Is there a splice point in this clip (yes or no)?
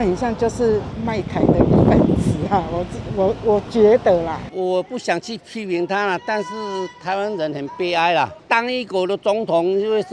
no